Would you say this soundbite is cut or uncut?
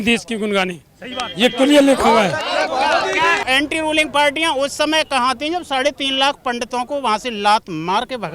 cut